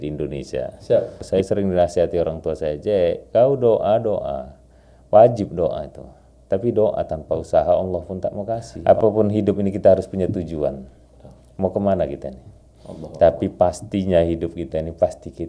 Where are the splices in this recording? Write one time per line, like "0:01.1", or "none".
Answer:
0:01.2
0:08.6

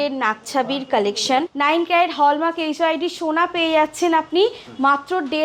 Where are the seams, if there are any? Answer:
0:01.5

